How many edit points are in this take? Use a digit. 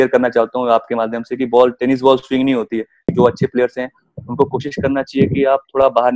1